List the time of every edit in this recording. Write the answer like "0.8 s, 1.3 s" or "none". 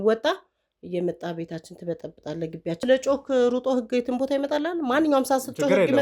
2.8 s